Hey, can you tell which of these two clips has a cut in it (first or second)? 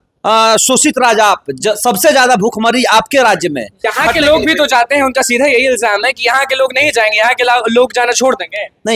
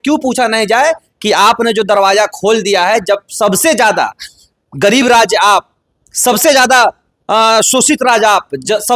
first